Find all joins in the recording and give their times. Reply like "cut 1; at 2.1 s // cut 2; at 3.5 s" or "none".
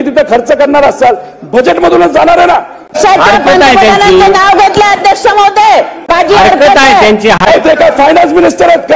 cut 1; at 3.0 s // cut 2; at 6.1 s // cut 3; at 7.4 s